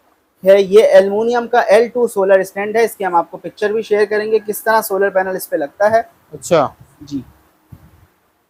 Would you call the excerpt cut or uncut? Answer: uncut